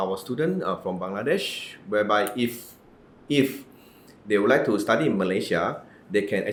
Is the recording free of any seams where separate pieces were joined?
yes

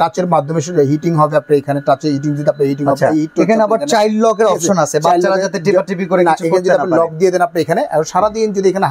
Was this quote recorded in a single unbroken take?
yes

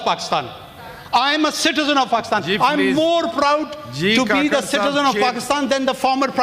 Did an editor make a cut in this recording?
no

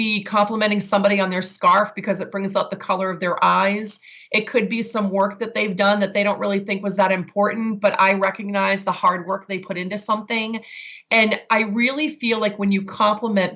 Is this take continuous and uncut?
yes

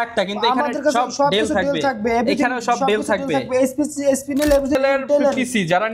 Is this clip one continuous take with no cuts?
no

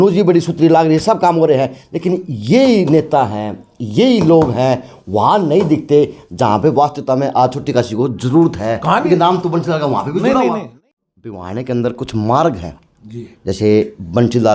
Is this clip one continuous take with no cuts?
no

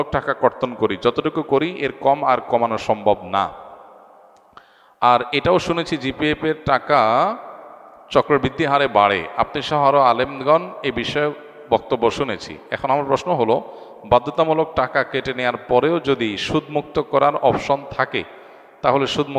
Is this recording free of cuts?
yes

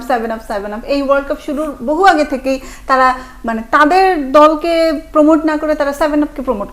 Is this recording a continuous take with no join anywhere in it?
yes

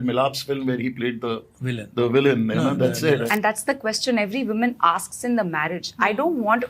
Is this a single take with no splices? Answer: no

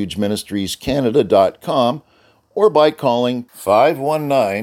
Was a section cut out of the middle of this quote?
no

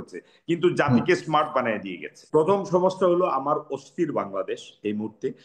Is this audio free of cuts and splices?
no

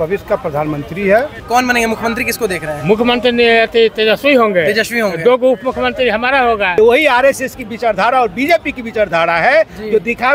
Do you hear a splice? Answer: yes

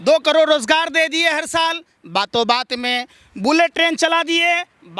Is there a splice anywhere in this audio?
no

